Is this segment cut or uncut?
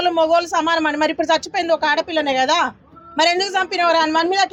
uncut